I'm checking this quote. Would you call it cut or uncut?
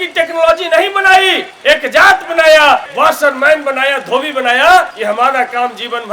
cut